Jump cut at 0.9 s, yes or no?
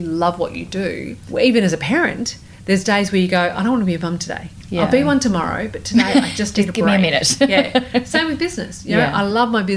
no